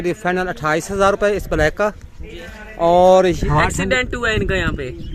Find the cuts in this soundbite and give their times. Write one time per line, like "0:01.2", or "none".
0:03.4